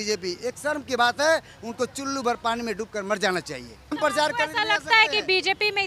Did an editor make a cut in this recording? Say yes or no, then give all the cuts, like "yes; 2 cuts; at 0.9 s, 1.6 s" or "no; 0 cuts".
yes; 1 cut; at 3.9 s